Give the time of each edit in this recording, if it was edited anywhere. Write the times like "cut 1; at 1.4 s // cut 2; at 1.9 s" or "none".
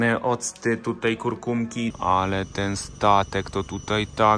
cut 1; at 1.9 s